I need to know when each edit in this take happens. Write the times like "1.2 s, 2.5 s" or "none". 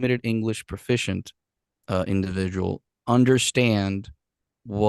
none